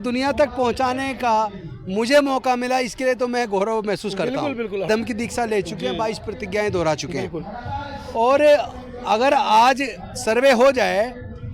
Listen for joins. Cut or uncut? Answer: cut